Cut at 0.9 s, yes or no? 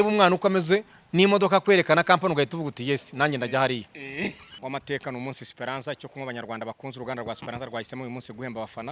no